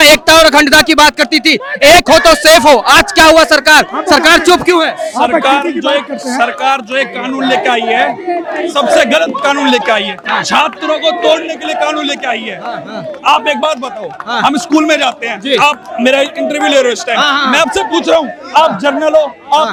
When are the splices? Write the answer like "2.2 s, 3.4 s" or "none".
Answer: none